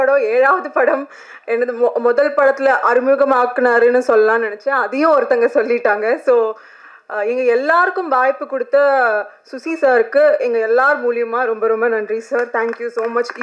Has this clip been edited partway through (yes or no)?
no